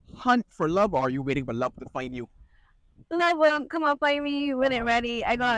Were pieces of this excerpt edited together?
no; 0 cuts

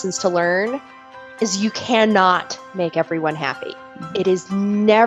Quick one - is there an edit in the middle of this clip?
no; 0 cuts

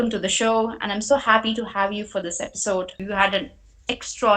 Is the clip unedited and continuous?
no; 1 cut; at 3.0 s

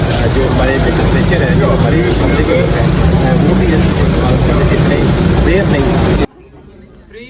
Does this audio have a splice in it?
yes; 1 cut; at 6.3 s

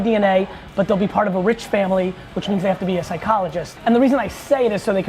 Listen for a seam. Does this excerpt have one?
yes; 1 cut; at 3.7 s

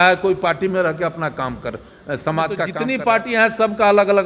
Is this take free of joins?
no; 1 cut; at 2.8 s

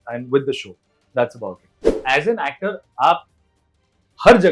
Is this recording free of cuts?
no; 1 cut; at 1.9 s

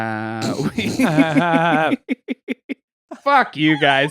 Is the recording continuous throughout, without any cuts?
no; 1 cut; at 3.0 s

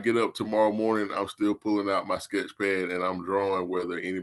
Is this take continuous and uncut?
yes; 0 cuts

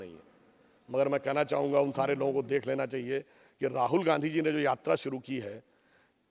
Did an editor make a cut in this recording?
no; 0 cuts

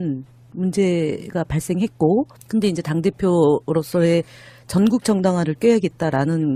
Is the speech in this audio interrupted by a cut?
no; 0 cuts

